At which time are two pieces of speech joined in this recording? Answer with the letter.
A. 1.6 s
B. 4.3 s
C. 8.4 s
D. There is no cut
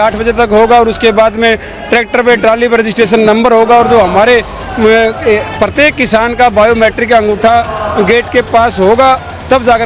D